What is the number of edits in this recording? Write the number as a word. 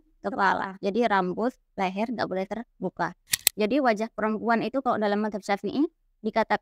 one